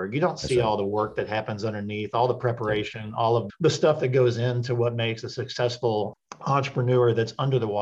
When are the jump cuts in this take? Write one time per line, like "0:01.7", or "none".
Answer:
0:06.1